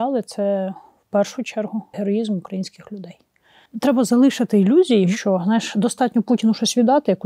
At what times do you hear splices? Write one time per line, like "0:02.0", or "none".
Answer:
0:01.9
0:03.7
0:05.1